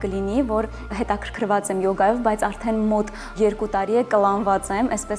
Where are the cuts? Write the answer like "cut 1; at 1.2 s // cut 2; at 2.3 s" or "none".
cut 1; at 0.9 s // cut 2; at 3.3 s